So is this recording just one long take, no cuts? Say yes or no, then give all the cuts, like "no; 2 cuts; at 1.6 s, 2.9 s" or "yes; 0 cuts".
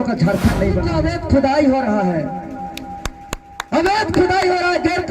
no; 1 cut; at 0.9 s